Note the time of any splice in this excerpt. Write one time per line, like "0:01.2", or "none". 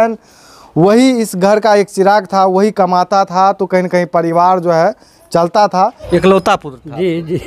0:06.0